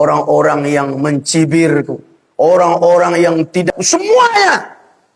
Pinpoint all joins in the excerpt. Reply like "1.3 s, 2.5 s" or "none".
3.7 s